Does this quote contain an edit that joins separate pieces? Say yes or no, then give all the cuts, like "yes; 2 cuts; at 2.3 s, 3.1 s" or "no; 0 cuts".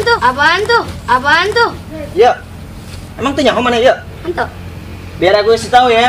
no; 0 cuts